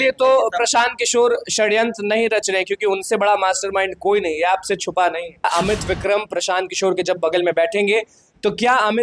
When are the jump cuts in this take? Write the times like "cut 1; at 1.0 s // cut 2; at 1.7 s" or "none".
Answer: cut 1; at 5.4 s